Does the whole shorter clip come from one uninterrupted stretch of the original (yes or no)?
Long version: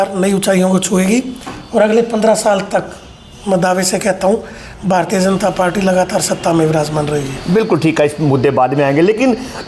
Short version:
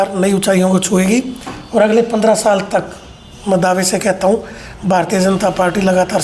yes